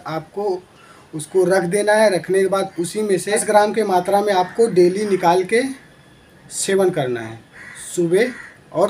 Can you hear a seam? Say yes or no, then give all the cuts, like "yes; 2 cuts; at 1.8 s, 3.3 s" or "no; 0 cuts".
yes; 1 cut; at 3.4 s